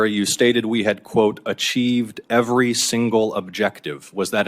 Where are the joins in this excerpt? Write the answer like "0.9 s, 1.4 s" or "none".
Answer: none